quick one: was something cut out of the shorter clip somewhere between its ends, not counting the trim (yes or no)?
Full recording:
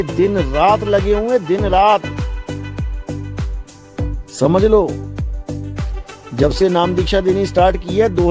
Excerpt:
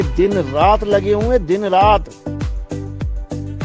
yes